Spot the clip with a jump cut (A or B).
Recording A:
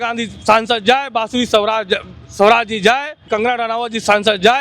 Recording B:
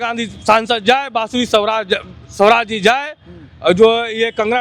A